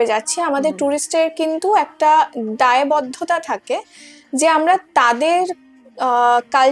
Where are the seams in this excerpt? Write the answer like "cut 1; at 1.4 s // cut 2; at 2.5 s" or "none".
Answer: none